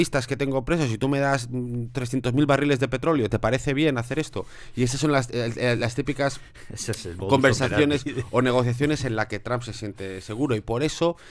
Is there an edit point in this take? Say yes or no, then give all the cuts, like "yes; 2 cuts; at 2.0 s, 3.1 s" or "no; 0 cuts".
no; 0 cuts